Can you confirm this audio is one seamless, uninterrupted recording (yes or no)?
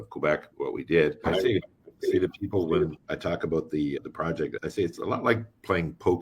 no